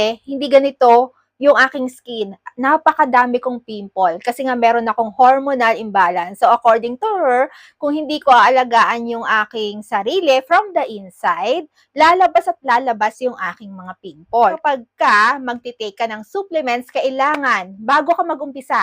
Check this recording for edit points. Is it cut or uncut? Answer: cut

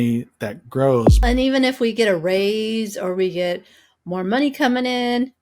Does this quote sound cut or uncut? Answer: cut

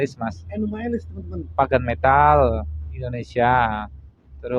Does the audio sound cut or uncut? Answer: uncut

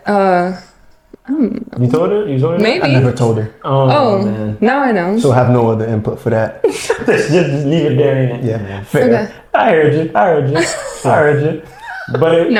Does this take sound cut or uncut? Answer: uncut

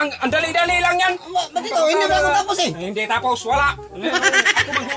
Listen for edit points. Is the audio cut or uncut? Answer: uncut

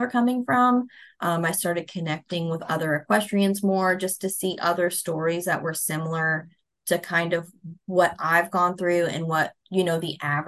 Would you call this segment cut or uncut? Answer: uncut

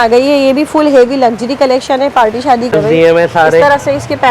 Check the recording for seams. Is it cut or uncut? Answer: cut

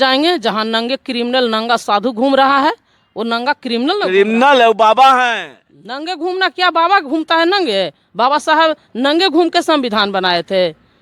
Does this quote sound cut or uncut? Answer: uncut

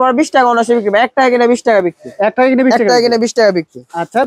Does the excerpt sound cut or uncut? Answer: uncut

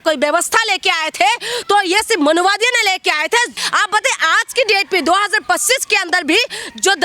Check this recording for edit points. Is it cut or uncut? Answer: cut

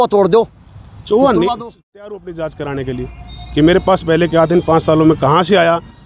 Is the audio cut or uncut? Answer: cut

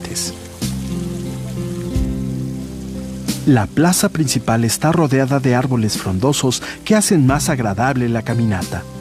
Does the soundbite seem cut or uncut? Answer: uncut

